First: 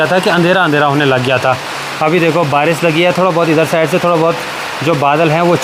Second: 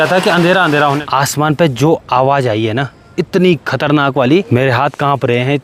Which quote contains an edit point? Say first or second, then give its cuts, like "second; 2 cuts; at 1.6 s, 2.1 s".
second; 2 cuts; at 1.0 s, 4.5 s